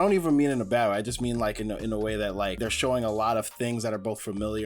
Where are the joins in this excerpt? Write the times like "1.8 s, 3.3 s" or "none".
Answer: 2.6 s